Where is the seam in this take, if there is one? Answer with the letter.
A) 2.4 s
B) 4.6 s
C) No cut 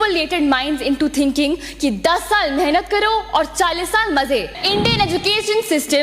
B